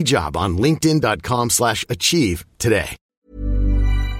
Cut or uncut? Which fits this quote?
cut